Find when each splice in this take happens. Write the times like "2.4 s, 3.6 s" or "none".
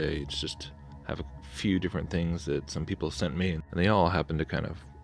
1.4 s